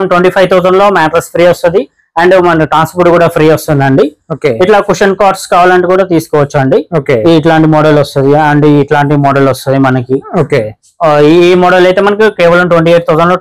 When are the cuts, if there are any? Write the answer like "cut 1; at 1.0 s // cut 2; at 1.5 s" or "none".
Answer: none